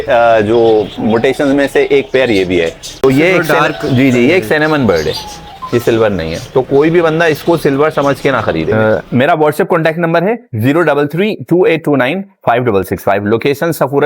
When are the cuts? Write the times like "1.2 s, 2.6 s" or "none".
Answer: 2.8 s, 8.7 s

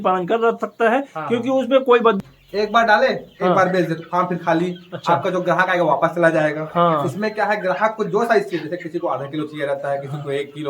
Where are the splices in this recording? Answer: 2.2 s

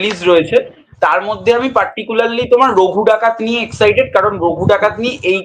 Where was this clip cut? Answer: none

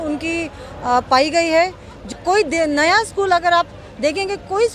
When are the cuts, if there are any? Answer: 2.0 s

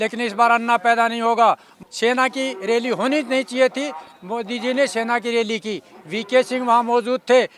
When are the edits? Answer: 1.7 s

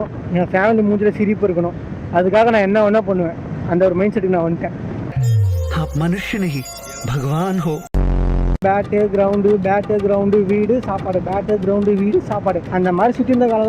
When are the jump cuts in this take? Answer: 8.6 s, 12.6 s

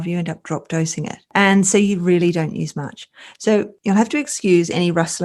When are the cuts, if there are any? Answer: none

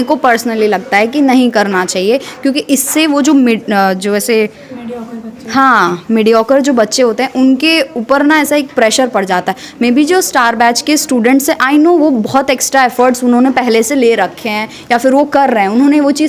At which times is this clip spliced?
none

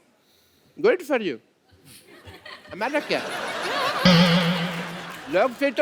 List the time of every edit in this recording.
none

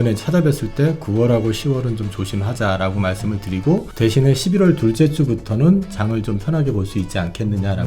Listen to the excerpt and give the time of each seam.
3.9 s

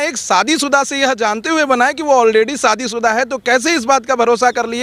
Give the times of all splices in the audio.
none

